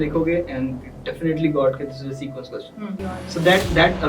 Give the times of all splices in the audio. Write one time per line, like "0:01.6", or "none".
0:03.0